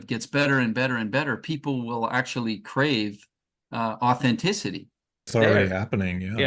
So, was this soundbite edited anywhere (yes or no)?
yes